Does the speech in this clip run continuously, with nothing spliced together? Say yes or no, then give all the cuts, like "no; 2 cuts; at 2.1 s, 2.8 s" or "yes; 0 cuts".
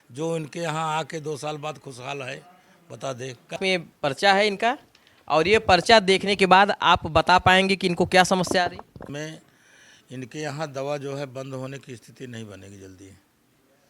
no; 2 cuts; at 3.6 s, 9.1 s